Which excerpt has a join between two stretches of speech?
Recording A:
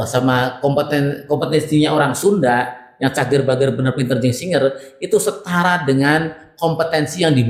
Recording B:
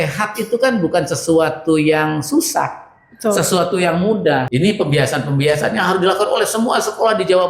B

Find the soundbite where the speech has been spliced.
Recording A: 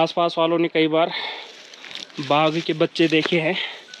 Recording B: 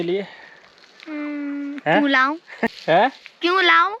B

